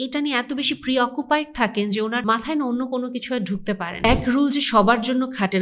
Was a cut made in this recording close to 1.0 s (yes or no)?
no